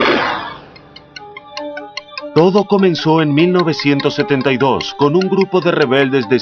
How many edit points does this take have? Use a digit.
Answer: 1